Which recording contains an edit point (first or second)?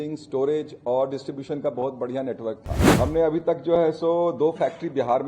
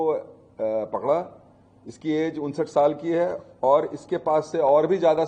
first